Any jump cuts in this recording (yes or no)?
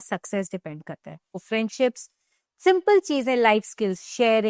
yes